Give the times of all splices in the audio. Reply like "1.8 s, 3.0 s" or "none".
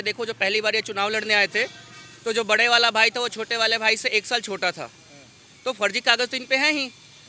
none